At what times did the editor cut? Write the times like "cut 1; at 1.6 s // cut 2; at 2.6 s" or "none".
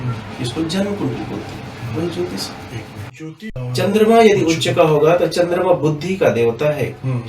cut 1; at 3.5 s